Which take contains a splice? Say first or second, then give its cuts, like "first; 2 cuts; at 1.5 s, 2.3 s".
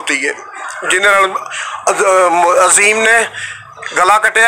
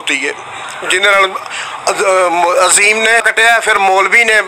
second; 1 cut; at 3.3 s